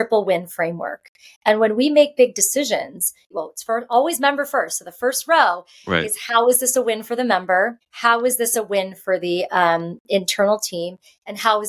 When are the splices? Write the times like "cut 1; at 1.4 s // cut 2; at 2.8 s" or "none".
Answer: cut 1; at 3.2 s // cut 2; at 7.9 s